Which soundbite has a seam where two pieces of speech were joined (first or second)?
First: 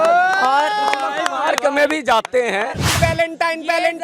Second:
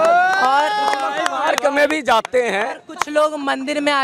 first